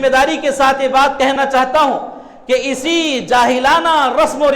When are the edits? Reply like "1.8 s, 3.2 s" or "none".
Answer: 1.3 s